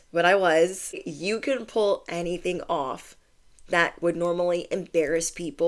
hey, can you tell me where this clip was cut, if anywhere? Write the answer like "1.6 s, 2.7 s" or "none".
1.1 s